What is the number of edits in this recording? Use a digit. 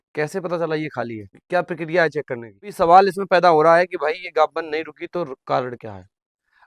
2